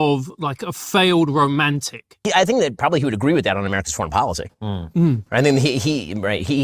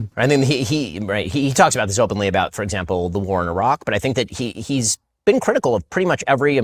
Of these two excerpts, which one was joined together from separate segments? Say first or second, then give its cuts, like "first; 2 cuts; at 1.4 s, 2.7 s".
first; 1 cut; at 2.2 s